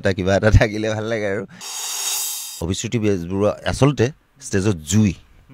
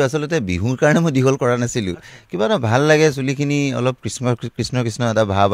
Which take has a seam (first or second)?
first